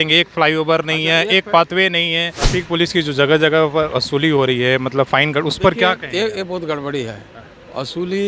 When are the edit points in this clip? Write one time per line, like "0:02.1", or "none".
0:02.3